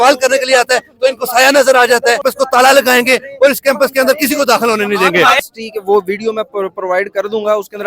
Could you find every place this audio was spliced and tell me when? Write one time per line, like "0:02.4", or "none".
0:02.3
0:05.4